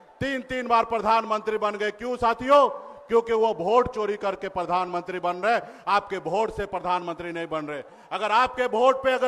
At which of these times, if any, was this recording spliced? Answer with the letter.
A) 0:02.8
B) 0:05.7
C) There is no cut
C